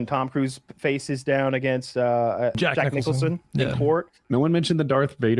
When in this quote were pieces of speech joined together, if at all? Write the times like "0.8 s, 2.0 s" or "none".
2.6 s, 4.2 s